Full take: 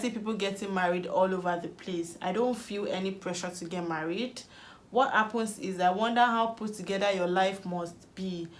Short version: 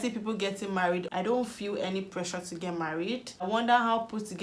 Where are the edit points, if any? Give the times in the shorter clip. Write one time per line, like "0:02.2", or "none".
0:01.1
0:03.5